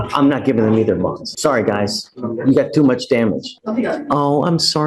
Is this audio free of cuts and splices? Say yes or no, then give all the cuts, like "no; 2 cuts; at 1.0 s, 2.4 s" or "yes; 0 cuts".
no; 2 cuts; at 1.3 s, 3.5 s